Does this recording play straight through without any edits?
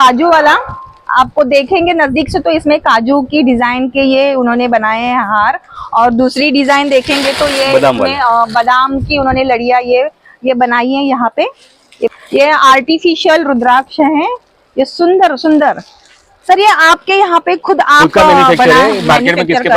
no; 1 cut; at 12.1 s

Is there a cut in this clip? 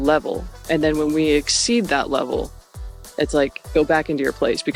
no; 0 cuts

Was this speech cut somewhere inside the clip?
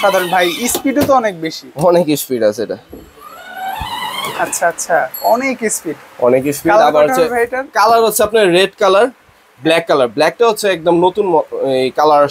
no; 0 cuts

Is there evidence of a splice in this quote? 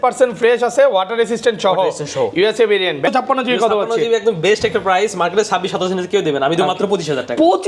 yes; 1 cut; at 3.0 s

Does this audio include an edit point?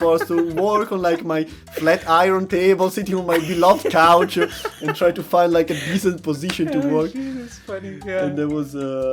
no; 0 cuts

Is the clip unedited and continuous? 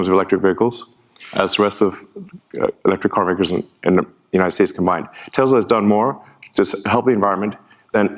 yes; 0 cuts

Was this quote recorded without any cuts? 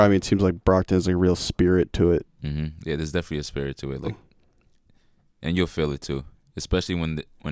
yes; 0 cuts

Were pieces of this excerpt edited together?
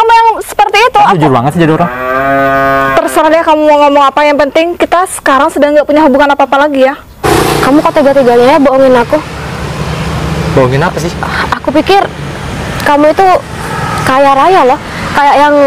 yes; 1 cut; at 7.2 s

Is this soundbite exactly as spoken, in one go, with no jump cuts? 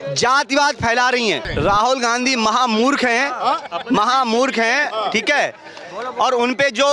no; 1 cut; at 1.4 s

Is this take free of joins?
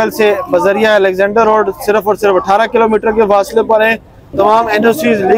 no; 1 cut; at 4.3 s

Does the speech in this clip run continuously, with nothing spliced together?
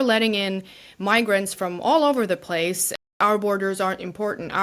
no; 1 cut; at 3.2 s

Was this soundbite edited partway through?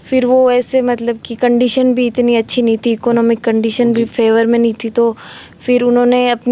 no; 0 cuts

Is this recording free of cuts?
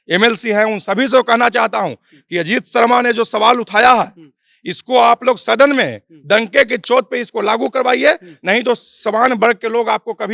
yes; 0 cuts

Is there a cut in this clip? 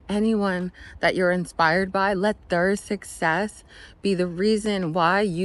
no; 0 cuts

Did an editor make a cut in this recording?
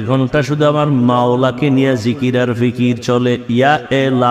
no; 0 cuts

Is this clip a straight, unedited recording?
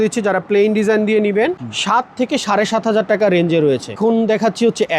no; 1 cut; at 3.9 s

